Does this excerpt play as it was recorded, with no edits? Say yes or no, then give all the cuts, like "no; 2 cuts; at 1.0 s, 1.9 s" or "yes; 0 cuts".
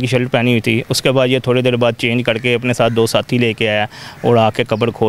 yes; 0 cuts